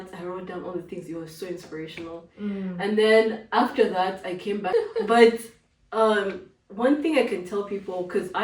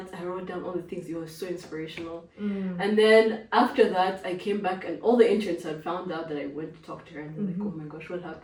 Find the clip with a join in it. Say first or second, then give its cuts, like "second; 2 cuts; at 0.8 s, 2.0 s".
first; 1 cut; at 4.6 s